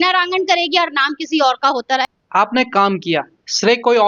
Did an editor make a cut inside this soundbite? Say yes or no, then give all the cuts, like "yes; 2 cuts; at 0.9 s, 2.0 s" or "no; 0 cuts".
yes; 1 cut; at 2.2 s